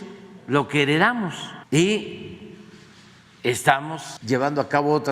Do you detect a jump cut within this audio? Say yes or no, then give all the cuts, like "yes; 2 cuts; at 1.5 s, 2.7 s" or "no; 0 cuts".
yes; 2 cuts; at 1.5 s, 4.1 s